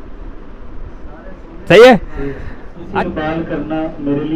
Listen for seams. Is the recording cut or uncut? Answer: cut